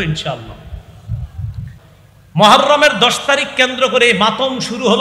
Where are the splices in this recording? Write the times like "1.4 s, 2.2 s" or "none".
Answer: 1.8 s

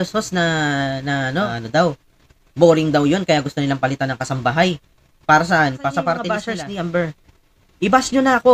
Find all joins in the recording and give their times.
1.6 s, 6.4 s

